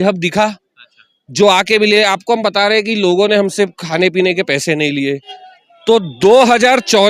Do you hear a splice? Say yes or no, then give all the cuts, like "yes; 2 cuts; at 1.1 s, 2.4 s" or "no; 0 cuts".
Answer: yes; 1 cut; at 5.3 s